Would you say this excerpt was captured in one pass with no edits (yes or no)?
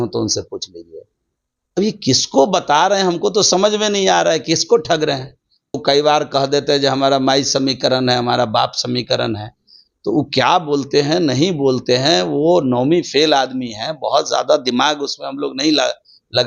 no